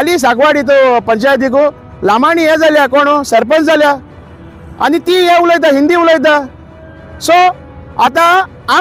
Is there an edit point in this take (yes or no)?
no